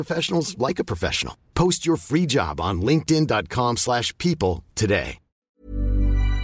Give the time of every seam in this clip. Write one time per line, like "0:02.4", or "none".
0:05.5